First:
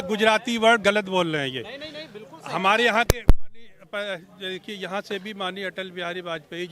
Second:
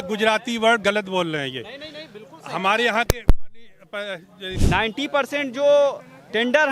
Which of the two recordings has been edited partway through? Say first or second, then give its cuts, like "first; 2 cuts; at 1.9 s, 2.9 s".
second; 1 cut; at 4.5 s